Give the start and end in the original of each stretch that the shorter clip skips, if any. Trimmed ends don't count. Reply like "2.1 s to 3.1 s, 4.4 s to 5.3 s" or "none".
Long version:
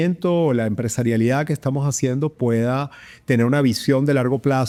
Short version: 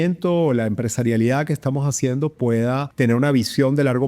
2.9 s to 3.2 s